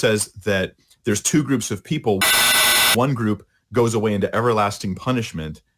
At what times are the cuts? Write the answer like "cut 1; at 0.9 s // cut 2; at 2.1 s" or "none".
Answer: cut 1; at 3.0 s